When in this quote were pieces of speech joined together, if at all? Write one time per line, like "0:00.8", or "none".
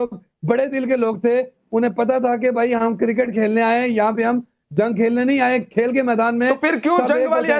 0:03.0